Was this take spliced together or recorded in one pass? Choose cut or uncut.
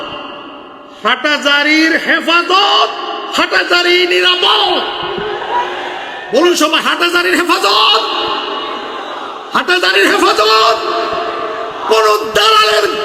uncut